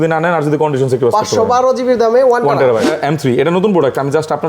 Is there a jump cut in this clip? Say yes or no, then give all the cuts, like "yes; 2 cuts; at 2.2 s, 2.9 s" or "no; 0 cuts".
yes; 1 cut; at 3.0 s